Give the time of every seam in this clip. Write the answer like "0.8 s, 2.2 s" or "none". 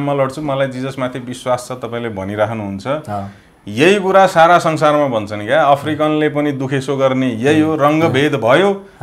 none

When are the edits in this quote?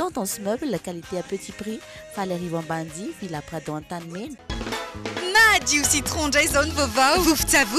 4.4 s

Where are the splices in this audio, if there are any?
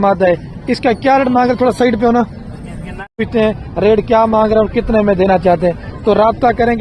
3.2 s

